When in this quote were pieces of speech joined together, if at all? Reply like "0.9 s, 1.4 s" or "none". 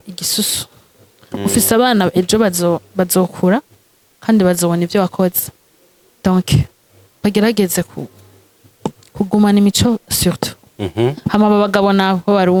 none